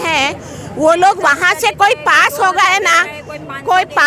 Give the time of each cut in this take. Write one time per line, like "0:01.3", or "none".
none